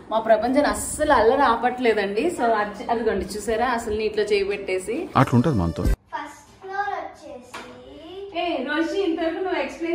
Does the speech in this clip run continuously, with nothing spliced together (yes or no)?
no